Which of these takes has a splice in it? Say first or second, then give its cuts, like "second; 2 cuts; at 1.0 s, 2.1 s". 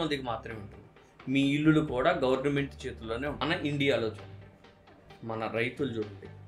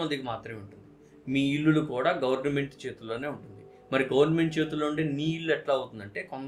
first; 1 cut; at 3.4 s